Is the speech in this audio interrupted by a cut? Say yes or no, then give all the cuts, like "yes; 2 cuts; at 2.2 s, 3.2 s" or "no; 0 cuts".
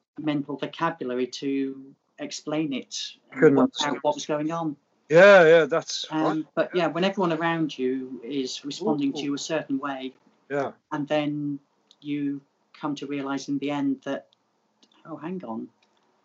no; 0 cuts